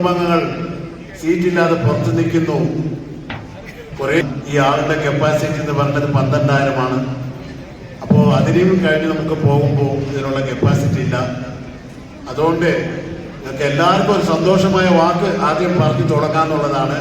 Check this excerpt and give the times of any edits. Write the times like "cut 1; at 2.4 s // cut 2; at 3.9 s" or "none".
cut 1; at 4.2 s